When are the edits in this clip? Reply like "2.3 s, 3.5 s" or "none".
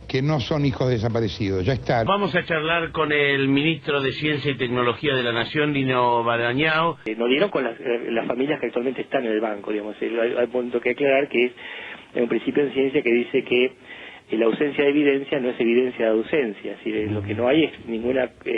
1.9 s